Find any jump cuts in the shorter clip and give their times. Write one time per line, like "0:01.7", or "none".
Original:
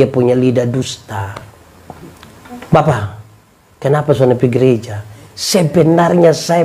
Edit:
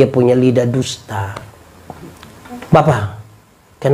none